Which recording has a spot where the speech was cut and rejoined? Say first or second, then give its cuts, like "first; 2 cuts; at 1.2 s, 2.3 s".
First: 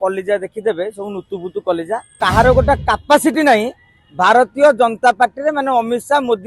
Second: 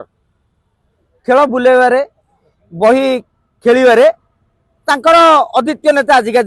first; 1 cut; at 2.1 s